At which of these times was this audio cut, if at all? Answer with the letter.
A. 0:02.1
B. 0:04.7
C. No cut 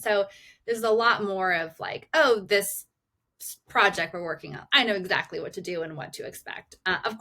C